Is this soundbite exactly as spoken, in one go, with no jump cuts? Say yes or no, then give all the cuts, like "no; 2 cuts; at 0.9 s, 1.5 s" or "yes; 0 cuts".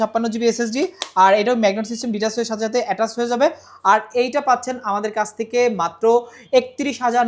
yes; 0 cuts